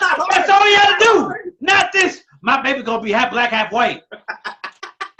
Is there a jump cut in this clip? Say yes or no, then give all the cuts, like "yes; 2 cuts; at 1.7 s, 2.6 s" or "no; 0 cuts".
no; 0 cuts